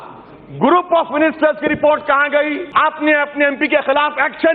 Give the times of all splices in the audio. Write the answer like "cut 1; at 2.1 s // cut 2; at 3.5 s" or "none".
cut 1; at 2.6 s